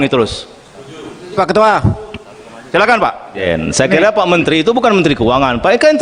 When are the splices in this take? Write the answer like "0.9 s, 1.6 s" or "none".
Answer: 3.4 s